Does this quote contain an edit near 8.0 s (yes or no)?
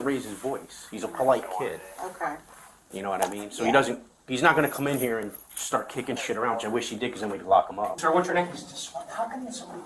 yes